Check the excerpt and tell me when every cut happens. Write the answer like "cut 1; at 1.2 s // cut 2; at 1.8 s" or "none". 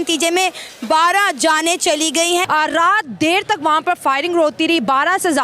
cut 1; at 2.5 s